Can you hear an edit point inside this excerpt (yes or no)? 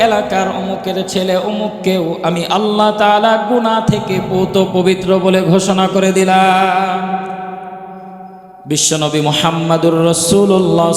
yes